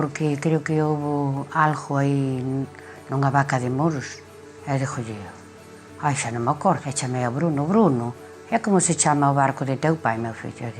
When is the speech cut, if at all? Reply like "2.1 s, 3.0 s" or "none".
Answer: 6.8 s